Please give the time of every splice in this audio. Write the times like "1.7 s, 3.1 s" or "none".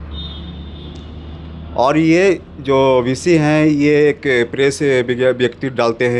none